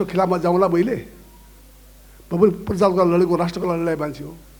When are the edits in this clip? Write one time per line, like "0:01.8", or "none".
none